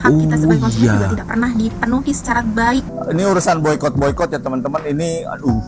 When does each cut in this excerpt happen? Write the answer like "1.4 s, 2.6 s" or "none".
2.9 s